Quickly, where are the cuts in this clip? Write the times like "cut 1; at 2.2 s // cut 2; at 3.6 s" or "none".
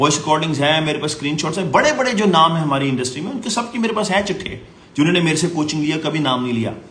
none